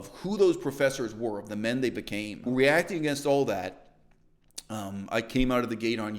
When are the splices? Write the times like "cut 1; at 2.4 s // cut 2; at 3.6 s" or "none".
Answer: cut 1; at 2.5 s